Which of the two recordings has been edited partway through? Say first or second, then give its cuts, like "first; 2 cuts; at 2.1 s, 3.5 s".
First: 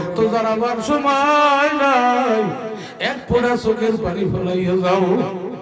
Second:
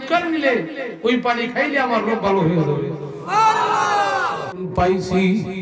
second; 1 cut; at 4.5 s